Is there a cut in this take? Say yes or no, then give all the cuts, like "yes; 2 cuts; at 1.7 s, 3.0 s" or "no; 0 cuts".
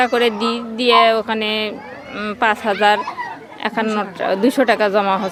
no; 0 cuts